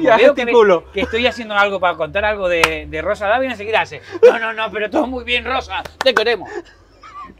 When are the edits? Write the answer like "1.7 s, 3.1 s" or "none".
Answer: none